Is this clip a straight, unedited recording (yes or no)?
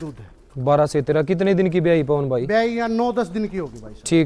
yes